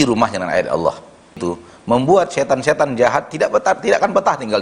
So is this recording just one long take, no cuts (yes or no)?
no